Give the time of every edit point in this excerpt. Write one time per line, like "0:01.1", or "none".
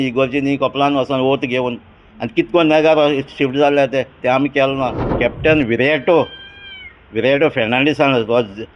0:05.0